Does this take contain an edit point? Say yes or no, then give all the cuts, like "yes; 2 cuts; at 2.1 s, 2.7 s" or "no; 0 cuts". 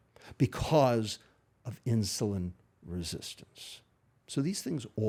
no; 0 cuts